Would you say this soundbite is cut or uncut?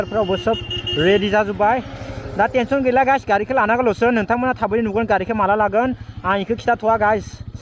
uncut